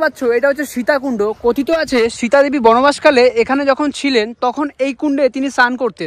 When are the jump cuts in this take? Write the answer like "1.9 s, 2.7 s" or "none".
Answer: none